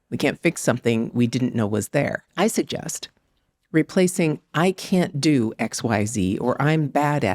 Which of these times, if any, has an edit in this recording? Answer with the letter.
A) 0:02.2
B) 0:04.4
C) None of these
A